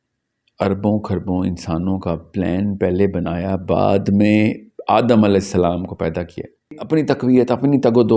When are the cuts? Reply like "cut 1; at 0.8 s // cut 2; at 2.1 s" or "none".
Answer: cut 1; at 6.8 s